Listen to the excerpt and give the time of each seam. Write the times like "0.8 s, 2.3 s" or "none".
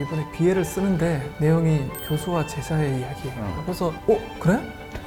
none